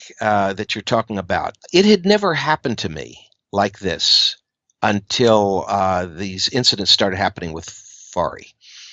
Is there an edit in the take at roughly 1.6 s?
yes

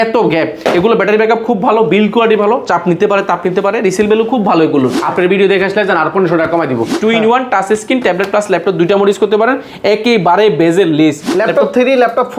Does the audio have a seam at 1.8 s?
no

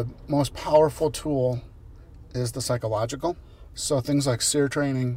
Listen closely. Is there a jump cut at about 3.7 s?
yes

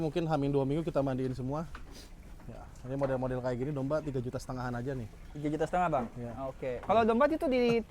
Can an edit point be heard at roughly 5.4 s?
no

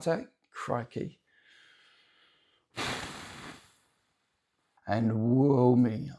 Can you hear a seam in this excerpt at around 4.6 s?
yes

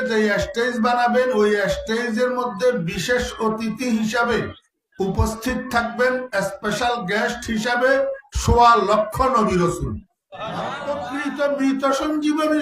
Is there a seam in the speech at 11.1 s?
yes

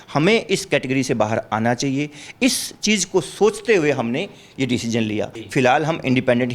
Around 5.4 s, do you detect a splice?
yes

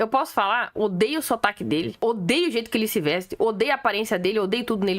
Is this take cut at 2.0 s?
yes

